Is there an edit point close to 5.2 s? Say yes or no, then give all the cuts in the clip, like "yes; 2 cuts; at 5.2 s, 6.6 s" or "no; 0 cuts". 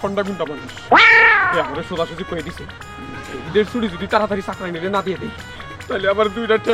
no; 0 cuts